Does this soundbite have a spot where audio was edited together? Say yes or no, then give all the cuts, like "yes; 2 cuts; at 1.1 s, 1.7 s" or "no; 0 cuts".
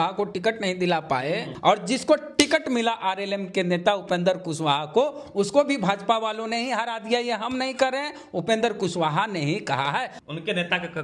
yes; 2 cuts; at 1.5 s, 10.1 s